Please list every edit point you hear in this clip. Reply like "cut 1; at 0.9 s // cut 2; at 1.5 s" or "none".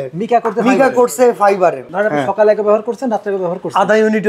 cut 1; at 1.9 s